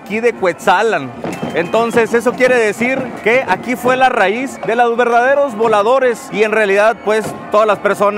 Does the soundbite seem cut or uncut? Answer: uncut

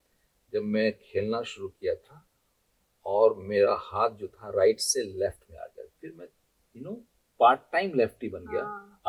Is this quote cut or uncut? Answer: uncut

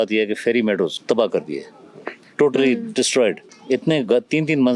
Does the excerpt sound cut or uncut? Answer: cut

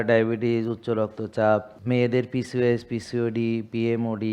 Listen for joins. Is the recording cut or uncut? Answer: cut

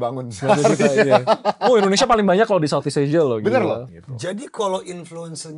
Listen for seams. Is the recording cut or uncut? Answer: cut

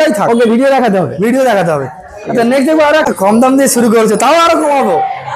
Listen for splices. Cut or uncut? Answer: cut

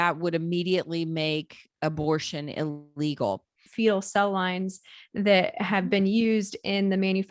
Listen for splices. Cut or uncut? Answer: cut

